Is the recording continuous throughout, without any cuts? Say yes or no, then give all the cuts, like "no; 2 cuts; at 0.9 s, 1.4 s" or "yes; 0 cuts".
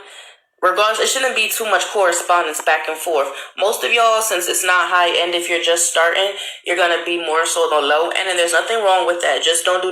no; 1 cut; at 4.9 s